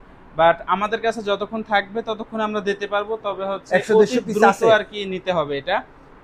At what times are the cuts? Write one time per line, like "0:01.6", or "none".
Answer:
none